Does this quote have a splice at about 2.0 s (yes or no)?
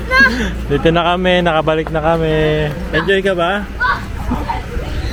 no